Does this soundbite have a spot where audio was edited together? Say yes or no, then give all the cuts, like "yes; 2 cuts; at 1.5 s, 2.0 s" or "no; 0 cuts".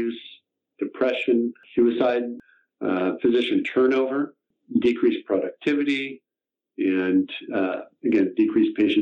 yes; 3 cuts; at 1.6 s, 2.4 s, 4.6 s